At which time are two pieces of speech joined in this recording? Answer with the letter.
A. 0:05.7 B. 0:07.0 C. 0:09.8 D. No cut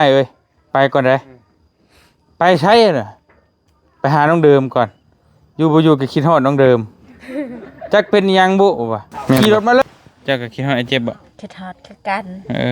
C